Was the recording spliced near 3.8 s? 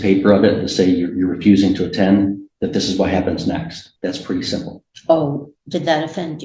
yes; 1 cut; at 3.8 s

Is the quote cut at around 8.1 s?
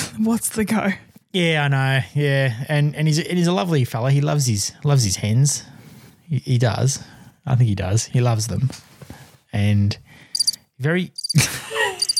yes; 1 cut; at 8.1 s

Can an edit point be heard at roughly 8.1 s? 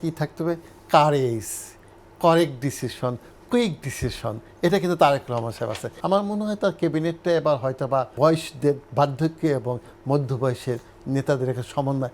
yes; 2 cuts; at 5.9 s, 8.1 s

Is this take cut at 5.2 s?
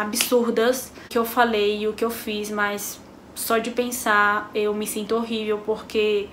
no; 1 cut; at 1.1 s

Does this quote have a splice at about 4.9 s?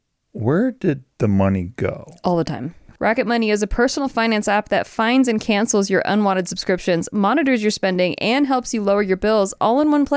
no; 1 cut; at 2.9 s

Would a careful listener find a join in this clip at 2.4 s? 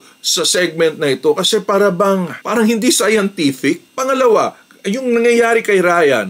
yes; 2 cuts; at 2.4 s, 3.9 s

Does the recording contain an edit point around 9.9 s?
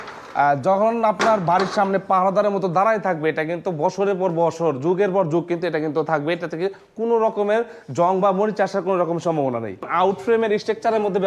yes; 1 cut; at 9.9 s

